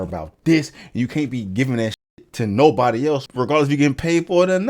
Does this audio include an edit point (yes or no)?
yes